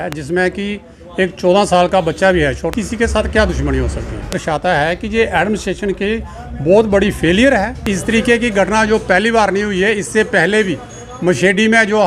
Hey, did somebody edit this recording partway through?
yes; 3 cuts; at 2.7 s, 4.4 s, 7.9 s

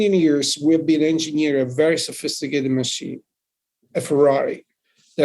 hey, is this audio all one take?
yes; 0 cuts

